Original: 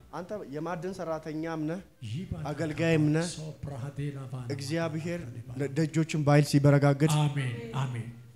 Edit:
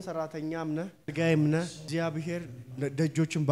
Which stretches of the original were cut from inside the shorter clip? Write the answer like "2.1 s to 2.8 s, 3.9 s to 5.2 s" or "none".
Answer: 2.0 s to 2.7 s, 3.5 s to 4.6 s